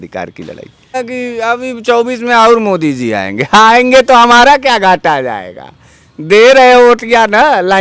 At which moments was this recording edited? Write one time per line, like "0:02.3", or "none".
0:00.9